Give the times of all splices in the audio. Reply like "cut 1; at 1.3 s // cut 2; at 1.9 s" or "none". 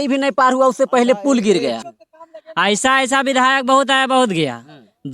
cut 1; at 1.8 s